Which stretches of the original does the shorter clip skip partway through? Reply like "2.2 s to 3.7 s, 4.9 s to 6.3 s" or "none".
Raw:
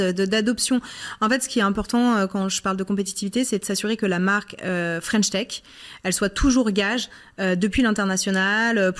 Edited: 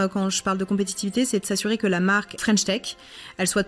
4.5 s to 5.0 s